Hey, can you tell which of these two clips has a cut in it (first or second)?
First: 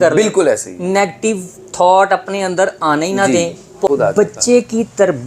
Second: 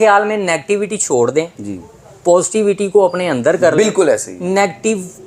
first